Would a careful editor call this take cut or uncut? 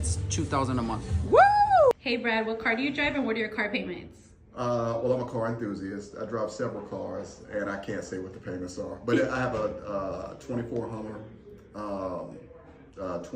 cut